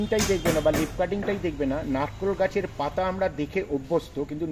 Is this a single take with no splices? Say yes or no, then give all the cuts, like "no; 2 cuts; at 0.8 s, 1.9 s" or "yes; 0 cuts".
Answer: yes; 0 cuts